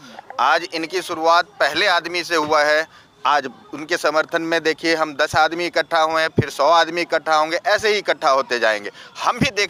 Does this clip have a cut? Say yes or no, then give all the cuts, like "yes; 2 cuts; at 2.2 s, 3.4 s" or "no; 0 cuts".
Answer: no; 0 cuts